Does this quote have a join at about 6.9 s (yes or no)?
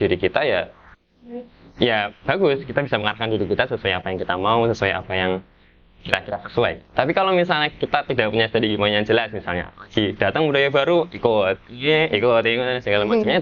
no